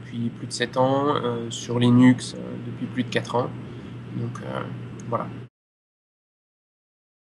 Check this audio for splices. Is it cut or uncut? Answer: uncut